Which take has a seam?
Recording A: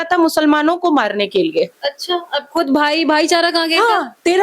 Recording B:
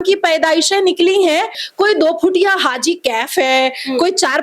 B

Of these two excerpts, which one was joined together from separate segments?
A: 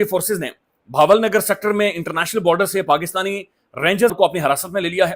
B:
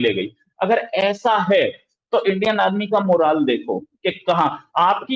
A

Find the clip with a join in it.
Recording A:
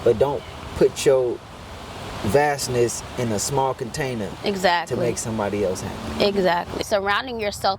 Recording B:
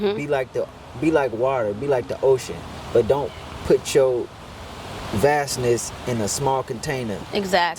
A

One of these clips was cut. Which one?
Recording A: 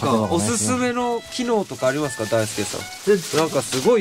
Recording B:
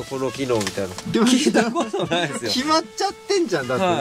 B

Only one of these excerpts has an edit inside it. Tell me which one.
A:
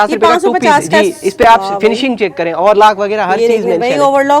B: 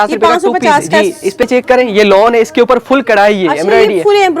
B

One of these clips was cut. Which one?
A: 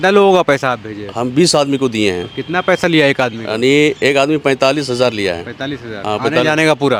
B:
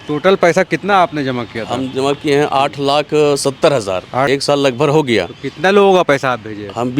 B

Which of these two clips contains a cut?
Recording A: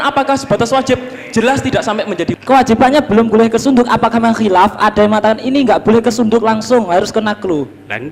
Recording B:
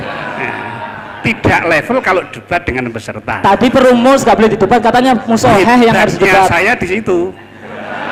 A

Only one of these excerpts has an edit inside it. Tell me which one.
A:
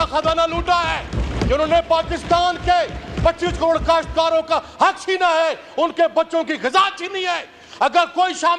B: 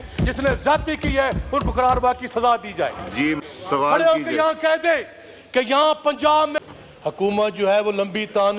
B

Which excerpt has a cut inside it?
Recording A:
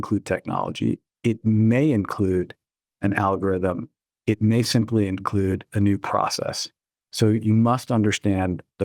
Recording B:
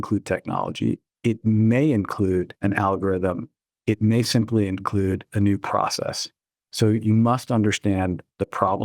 B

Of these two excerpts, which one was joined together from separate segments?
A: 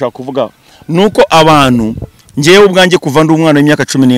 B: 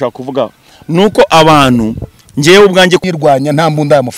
B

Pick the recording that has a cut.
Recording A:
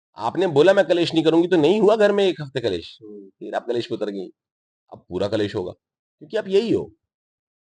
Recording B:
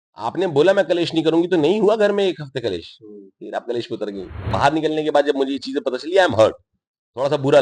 B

